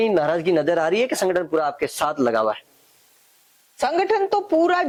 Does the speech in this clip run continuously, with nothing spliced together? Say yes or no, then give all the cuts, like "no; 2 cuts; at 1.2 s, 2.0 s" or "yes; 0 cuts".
yes; 0 cuts